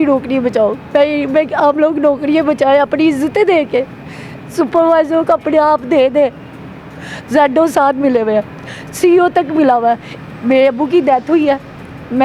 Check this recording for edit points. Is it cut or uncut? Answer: uncut